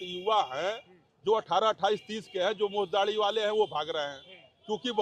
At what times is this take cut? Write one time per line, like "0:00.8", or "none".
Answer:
none